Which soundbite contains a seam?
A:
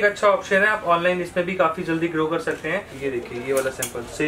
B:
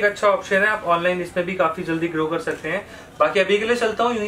A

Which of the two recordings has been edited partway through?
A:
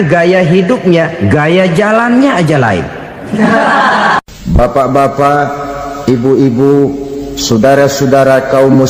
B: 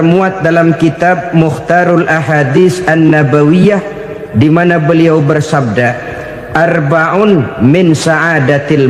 A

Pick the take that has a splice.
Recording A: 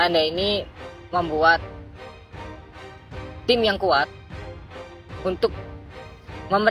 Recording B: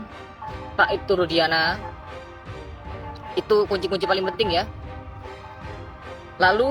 B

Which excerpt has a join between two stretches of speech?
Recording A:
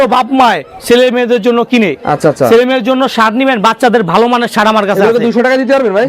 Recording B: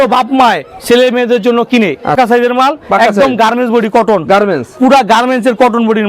B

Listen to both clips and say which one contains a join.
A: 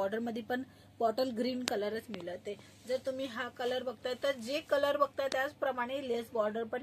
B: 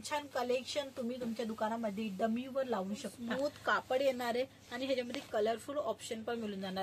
B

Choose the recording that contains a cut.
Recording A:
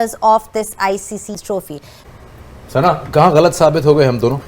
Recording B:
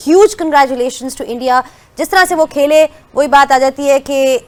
A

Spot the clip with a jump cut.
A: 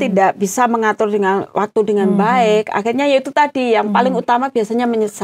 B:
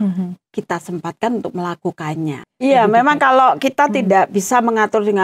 B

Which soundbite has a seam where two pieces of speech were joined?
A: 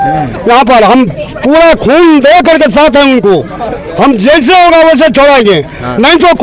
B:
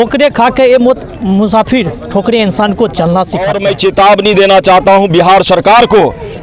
B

